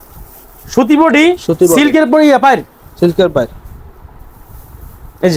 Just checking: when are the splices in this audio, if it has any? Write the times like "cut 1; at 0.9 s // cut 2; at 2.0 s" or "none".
none